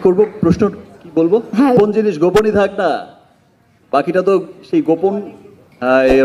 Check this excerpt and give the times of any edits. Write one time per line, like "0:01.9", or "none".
0:01.8